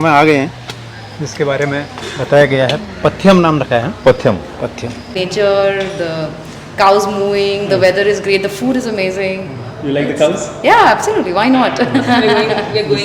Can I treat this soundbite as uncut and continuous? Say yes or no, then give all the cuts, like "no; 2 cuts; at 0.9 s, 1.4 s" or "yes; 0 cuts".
no; 1 cut; at 5.1 s